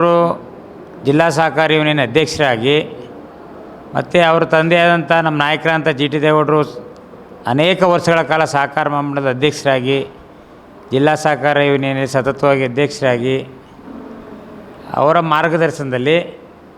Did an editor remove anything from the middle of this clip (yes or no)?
no